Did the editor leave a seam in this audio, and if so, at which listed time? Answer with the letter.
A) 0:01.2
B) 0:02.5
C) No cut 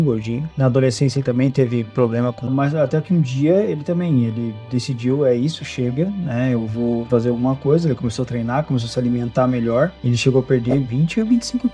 B